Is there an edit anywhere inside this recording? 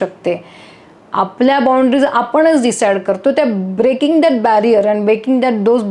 no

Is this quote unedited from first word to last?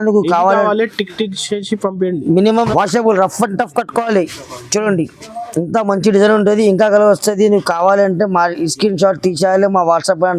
no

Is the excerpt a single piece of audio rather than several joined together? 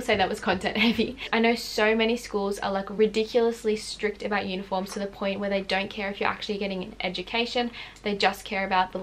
no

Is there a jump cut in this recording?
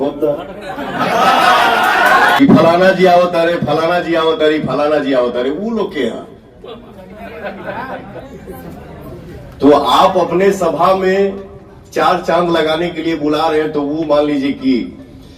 yes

